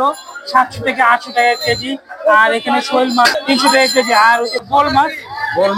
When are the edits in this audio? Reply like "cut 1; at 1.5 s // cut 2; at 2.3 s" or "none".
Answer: cut 1; at 3.4 s // cut 2; at 4.6 s